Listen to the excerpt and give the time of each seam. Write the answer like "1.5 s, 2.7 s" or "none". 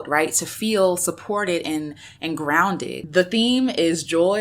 3.0 s

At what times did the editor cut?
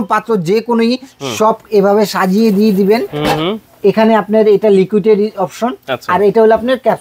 none

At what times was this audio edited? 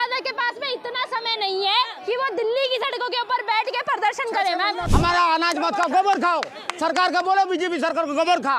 4.8 s

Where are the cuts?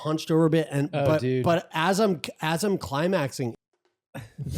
3.5 s

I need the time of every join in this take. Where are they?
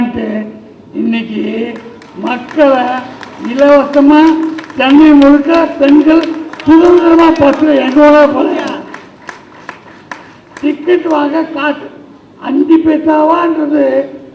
none

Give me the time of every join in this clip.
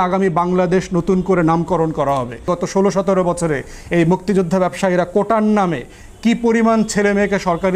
2.5 s

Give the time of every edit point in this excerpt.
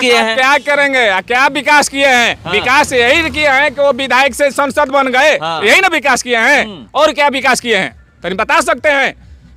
none

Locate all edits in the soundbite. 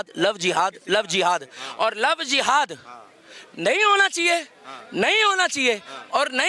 none

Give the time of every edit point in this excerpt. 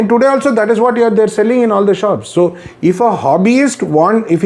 none

